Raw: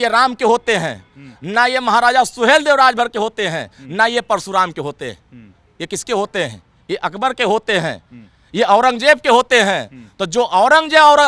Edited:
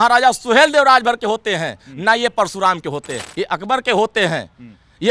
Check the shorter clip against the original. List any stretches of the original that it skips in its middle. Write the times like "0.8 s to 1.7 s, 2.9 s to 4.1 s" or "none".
5.1 s to 6.7 s